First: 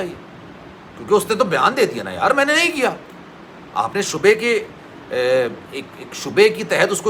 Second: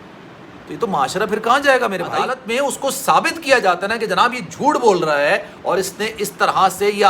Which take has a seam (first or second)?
second